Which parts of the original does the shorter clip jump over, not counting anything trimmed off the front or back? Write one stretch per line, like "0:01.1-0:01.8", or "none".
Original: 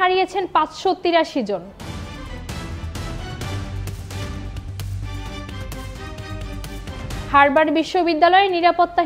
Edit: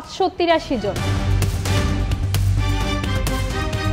0:01.7-0:03.5